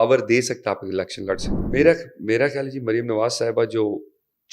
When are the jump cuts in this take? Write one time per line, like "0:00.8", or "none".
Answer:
0:01.5

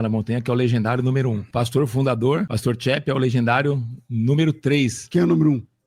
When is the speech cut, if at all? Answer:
0:01.4
0:02.5
0:05.0

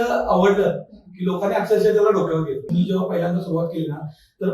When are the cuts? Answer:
0:02.7

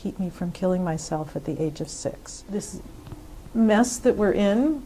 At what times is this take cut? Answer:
0:02.3

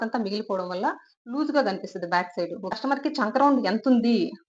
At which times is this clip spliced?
0:02.7

